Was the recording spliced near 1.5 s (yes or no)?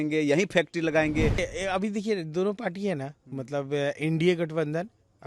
yes